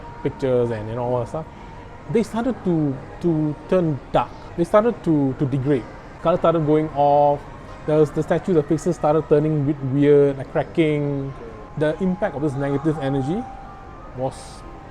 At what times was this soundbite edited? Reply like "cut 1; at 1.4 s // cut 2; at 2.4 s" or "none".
none